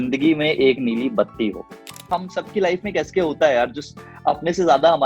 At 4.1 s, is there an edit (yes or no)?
no